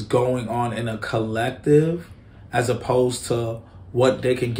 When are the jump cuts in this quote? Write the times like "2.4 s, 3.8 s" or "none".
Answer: none